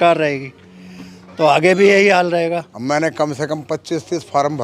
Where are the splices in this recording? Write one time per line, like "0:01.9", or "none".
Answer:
0:02.7